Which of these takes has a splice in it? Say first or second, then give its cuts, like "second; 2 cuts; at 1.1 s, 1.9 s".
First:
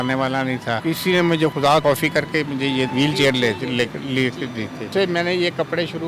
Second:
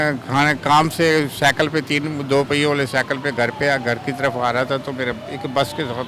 first; 4 cuts; at 0.8 s, 1.6 s, 2.9 s, 4.9 s